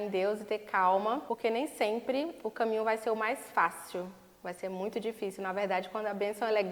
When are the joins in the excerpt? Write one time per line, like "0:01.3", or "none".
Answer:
0:01.2